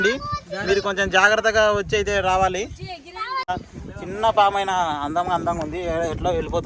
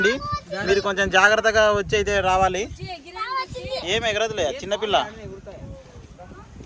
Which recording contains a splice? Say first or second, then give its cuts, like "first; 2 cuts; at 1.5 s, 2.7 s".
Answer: first; 1 cut; at 3.5 s